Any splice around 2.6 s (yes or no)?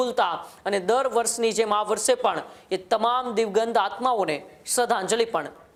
no